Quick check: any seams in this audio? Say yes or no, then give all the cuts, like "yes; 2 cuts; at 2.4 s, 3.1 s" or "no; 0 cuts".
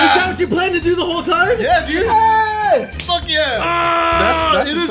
no; 0 cuts